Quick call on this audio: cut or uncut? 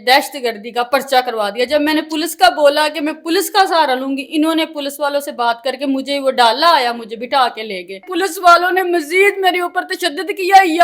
cut